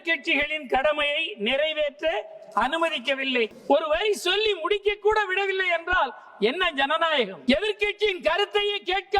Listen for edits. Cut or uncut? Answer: cut